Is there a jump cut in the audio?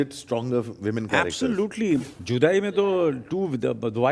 yes; 1 cut; at 2.0 s

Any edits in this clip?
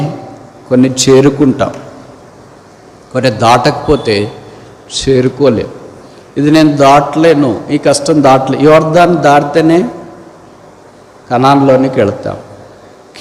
no; 0 cuts

